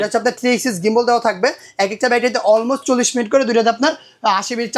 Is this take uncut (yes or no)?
yes